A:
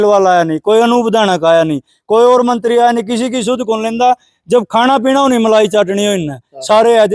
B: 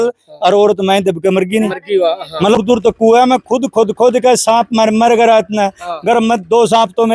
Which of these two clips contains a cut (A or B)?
B